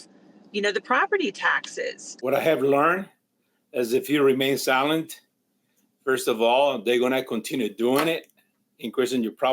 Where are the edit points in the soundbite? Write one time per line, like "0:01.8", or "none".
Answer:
0:02.0